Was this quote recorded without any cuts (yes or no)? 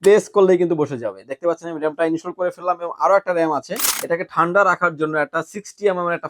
no